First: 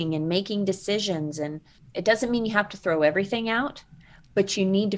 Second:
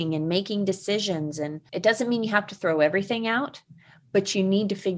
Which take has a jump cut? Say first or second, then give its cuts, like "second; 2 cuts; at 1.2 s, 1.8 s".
second; 1 cut; at 1.6 s